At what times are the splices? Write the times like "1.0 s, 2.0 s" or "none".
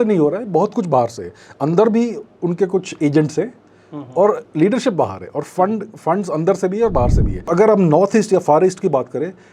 7.5 s